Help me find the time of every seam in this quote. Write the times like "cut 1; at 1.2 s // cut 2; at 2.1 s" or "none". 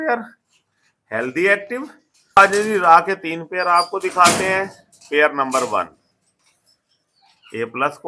cut 1; at 2.4 s